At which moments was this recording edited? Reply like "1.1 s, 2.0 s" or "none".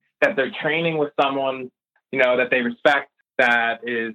3.2 s